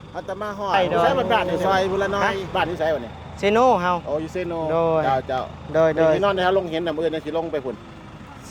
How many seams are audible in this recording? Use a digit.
1